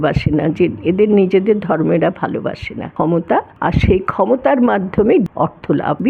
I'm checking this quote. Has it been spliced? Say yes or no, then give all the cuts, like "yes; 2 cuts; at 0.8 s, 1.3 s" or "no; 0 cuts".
yes; 2 cuts; at 3.2 s, 5.4 s